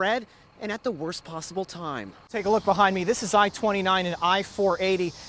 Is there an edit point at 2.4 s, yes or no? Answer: yes